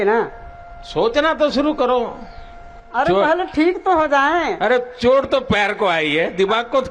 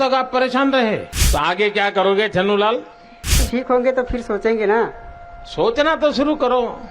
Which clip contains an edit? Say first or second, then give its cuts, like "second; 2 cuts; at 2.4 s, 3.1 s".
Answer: second; 2 cuts; at 1.2 s, 3.4 s